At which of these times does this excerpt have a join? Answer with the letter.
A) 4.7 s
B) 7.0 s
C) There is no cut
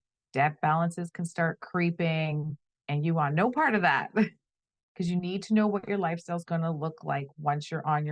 A